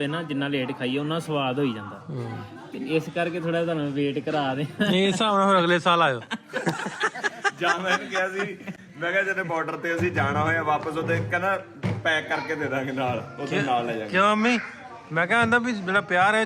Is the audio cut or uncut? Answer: uncut